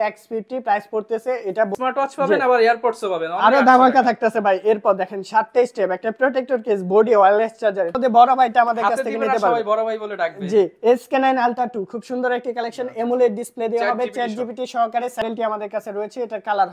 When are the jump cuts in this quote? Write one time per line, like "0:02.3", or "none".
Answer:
0:01.7
0:07.9
0:15.2

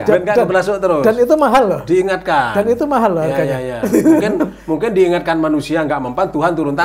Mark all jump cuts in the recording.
none

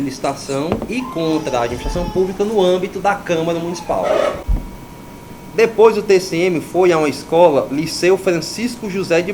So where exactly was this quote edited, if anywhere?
0:04.5

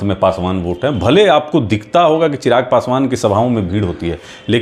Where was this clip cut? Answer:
none

